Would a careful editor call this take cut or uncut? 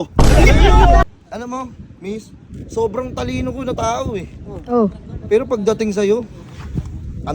cut